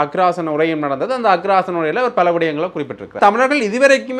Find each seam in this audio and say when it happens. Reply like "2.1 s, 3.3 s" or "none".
3.1 s